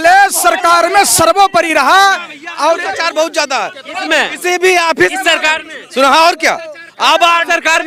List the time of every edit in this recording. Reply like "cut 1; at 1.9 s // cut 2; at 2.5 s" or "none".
none